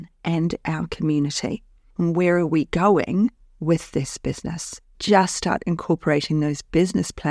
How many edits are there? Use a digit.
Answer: 1